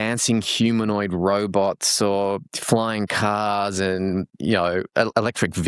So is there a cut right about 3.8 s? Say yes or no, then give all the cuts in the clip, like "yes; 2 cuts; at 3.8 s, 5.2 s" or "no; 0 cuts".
no; 0 cuts